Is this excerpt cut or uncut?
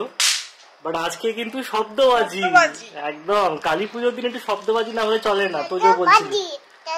uncut